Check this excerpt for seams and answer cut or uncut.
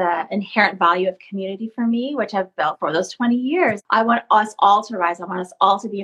cut